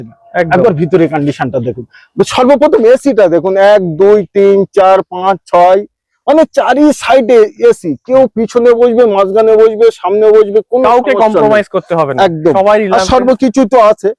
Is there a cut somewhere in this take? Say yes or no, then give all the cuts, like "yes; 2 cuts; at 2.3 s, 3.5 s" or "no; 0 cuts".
no; 0 cuts